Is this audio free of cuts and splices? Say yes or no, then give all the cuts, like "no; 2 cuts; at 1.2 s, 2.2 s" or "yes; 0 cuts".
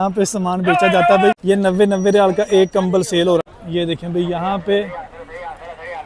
no; 2 cuts; at 1.4 s, 3.5 s